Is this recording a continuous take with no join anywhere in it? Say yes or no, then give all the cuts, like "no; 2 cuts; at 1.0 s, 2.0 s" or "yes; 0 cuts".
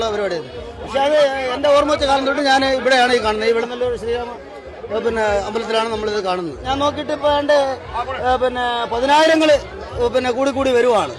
yes; 0 cuts